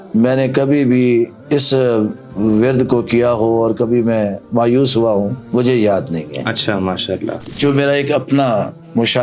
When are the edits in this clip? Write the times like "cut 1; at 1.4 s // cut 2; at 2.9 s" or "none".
cut 1; at 7.5 s